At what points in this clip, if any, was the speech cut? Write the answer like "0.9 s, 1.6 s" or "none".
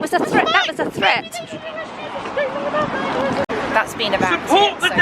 3.5 s